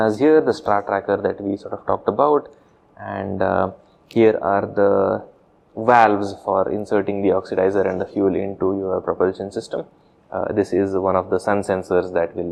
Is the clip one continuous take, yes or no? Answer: yes